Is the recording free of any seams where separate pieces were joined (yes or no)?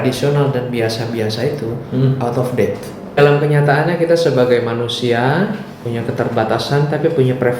no